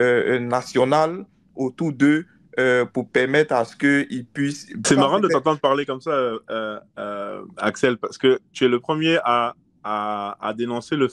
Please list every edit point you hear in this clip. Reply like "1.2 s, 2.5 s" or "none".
4.8 s